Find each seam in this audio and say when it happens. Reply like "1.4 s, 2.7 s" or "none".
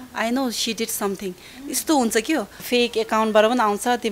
2.6 s